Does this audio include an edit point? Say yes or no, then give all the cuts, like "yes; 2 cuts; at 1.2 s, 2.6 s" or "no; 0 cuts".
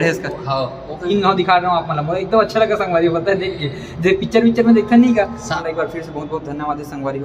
yes; 2 cuts; at 1.1 s, 5.6 s